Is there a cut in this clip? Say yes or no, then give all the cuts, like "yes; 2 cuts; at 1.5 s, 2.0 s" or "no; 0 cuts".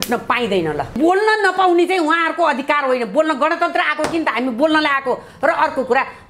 yes; 1 cut; at 1.0 s